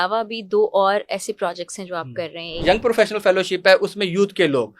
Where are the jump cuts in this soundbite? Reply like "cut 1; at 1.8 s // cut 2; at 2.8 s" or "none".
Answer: cut 1; at 2.6 s